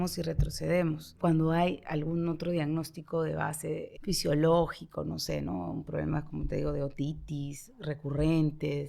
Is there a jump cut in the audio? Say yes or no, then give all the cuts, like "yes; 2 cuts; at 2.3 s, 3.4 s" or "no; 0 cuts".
yes; 2 cuts; at 1.1 s, 3.9 s